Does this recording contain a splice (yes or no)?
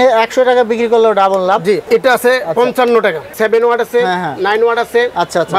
yes